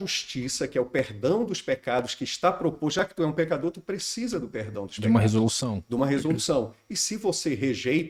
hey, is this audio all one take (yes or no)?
yes